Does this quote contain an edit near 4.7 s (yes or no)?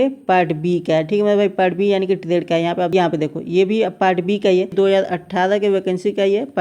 yes